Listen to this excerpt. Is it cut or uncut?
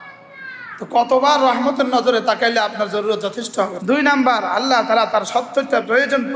cut